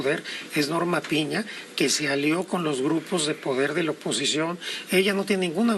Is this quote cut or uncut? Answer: uncut